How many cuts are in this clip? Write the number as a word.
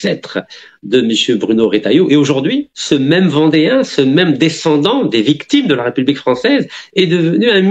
one